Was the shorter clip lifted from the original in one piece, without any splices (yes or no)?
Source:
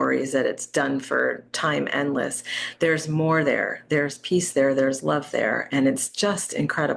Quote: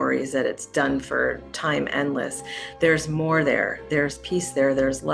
yes